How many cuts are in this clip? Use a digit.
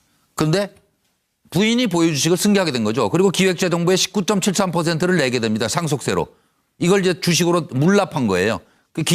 1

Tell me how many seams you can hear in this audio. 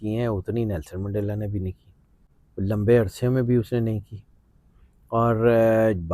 0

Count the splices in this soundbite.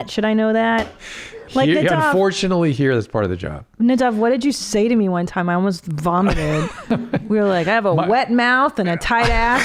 0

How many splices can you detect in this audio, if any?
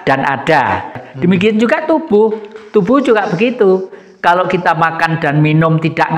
1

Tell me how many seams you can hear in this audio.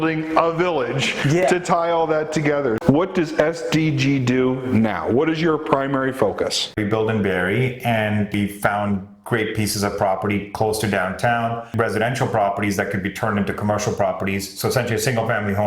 4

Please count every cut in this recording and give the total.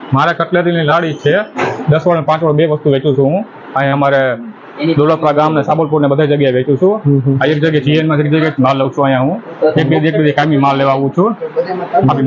0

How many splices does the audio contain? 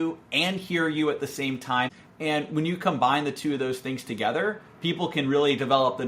1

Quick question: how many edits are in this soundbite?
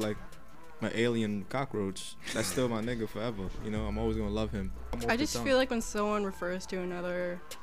1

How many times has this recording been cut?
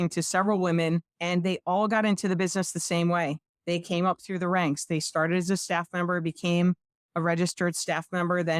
1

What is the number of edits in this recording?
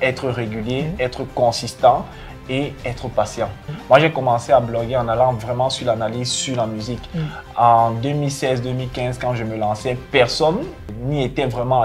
2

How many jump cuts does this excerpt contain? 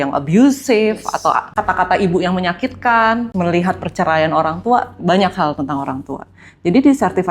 2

